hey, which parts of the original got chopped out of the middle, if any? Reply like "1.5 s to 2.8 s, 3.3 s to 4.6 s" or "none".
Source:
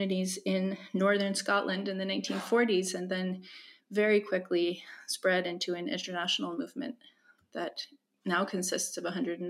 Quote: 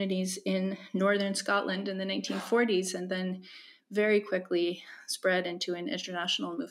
none